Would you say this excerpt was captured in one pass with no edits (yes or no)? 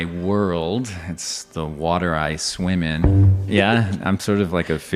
no